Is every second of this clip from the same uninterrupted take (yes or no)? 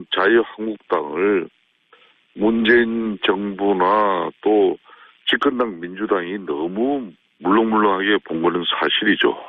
no